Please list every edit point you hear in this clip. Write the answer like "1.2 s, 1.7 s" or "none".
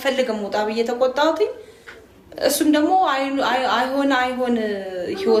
none